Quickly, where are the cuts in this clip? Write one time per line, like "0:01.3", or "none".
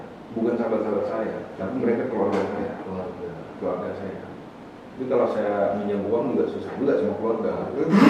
none